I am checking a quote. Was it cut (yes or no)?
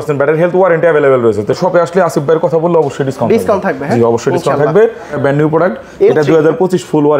yes